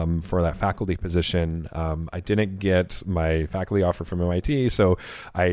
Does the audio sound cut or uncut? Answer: uncut